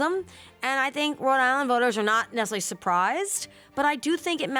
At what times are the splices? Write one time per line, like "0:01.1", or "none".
none